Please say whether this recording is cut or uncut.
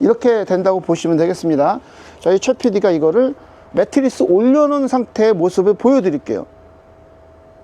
cut